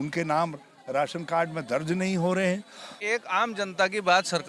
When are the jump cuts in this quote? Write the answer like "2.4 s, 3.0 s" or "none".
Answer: 2.9 s